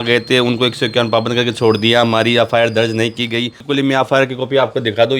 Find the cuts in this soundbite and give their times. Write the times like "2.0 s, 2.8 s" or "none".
3.6 s